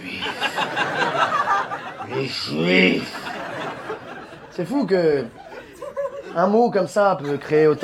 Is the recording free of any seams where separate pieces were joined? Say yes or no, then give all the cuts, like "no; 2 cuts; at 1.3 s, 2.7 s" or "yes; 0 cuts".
yes; 0 cuts